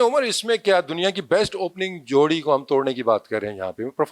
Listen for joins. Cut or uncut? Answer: uncut